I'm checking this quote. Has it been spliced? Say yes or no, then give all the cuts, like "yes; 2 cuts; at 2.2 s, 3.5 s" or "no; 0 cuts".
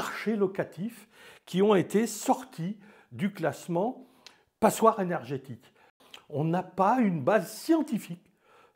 yes; 1 cut; at 5.9 s